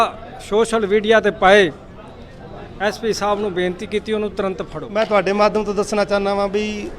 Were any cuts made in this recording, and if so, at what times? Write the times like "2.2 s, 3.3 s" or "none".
4.8 s